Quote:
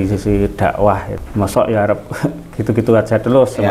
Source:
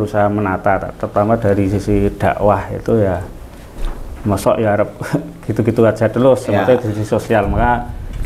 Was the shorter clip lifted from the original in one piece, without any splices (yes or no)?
no